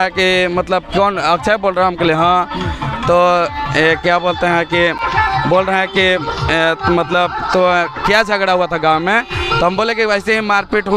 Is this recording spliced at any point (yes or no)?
no